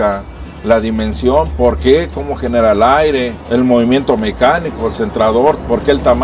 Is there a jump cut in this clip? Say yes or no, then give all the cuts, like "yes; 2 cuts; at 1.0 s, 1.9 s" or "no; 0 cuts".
no; 0 cuts